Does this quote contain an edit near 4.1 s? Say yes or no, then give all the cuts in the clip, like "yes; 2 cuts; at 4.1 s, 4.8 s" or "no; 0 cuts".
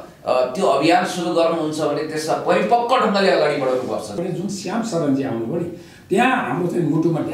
yes; 1 cut; at 4.1 s